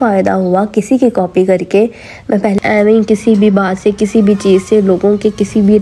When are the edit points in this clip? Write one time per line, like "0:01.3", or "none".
0:02.6